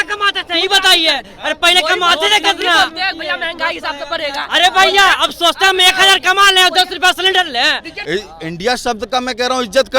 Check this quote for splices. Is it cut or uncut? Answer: cut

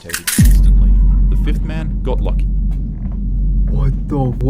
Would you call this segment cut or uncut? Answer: uncut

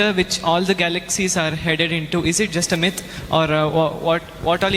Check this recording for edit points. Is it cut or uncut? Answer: uncut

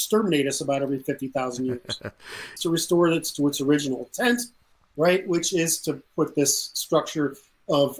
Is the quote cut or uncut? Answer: cut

